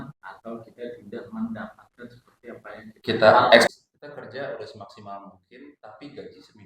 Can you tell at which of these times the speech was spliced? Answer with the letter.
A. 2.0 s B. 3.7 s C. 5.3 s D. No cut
B